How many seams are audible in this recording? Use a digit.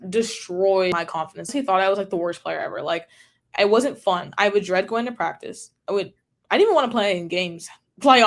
1